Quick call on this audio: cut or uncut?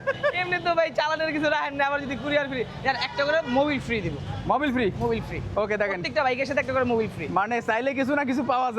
uncut